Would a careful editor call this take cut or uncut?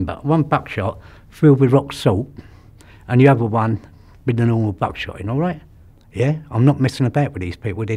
uncut